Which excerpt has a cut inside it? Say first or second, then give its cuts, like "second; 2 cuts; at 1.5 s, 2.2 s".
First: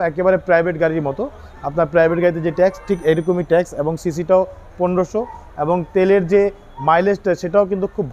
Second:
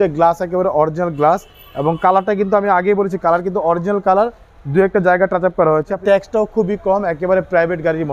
second; 1 cut; at 6.0 s